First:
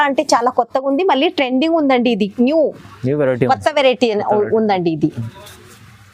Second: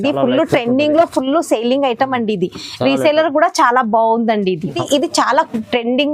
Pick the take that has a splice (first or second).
second